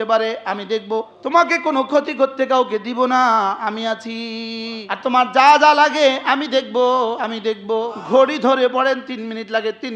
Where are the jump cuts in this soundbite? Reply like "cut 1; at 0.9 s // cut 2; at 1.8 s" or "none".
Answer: cut 1; at 1.1 s // cut 2; at 5.1 s // cut 3; at 7.8 s